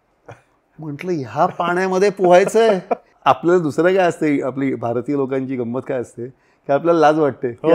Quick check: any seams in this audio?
yes; 1 cut; at 3.1 s

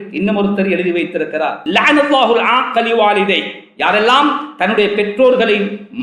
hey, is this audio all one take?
no; 1 cut; at 1.6 s

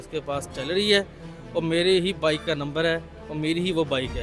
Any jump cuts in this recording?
no; 0 cuts

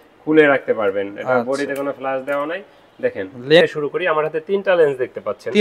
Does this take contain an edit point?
yes; 1 cut; at 3.6 s

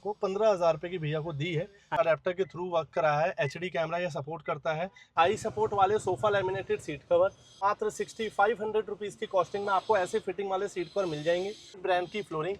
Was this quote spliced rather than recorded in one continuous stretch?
yes; 4 cuts; at 2.0 s, 5.1 s, 7.6 s, 11.8 s

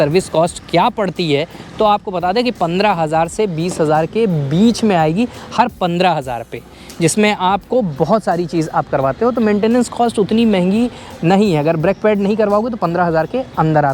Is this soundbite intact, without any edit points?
yes; 0 cuts

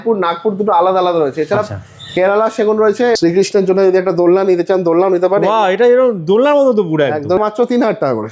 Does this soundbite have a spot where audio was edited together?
yes; 2 cuts; at 3.2 s, 7.4 s

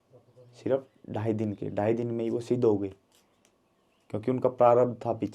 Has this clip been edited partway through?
no; 0 cuts

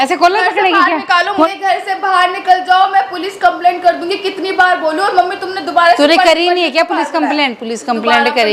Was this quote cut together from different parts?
yes; 1 cut; at 1.5 s

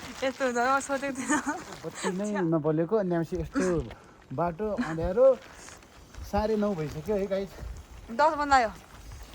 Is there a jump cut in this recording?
yes; 1 cut; at 1.9 s

